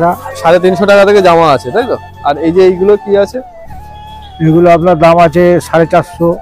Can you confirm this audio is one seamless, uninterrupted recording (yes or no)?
yes